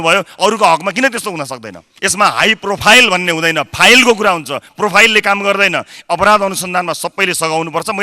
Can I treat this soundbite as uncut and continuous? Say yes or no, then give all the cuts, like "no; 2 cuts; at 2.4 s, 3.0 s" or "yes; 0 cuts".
no; 1 cut; at 1.9 s